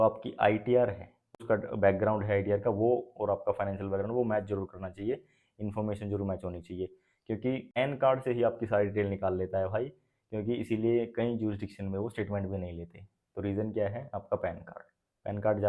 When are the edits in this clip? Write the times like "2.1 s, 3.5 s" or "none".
1.4 s, 7.8 s